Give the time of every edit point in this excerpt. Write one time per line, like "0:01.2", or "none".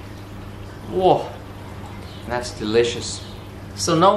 none